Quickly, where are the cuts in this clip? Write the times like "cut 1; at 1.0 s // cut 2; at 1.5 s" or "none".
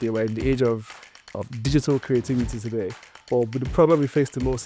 none

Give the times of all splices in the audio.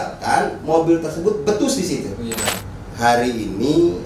cut 1; at 2.5 s

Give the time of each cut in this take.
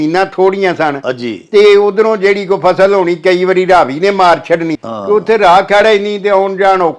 cut 1; at 4.8 s

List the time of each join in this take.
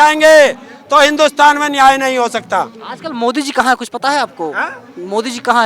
none

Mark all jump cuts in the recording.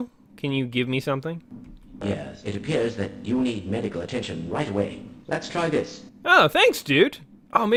none

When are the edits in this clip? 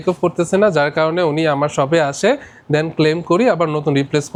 none

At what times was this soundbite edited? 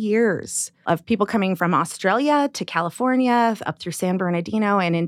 cut 1; at 1.0 s

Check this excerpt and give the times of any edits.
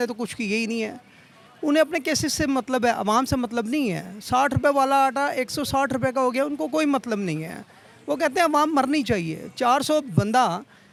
none

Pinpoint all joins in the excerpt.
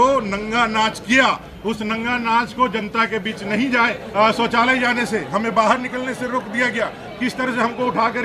cut 1; at 4.0 s

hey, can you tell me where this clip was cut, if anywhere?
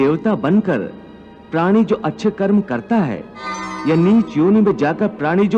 cut 1; at 3.7 s

